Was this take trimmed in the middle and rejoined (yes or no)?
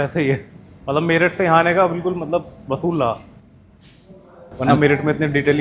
no